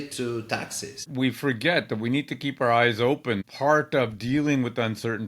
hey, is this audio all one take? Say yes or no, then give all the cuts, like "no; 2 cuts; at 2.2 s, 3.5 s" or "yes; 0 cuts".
no; 2 cuts; at 1.1 s, 3.4 s